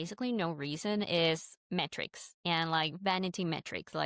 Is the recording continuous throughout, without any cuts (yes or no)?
no